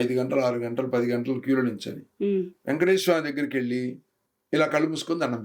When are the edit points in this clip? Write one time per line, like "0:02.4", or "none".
none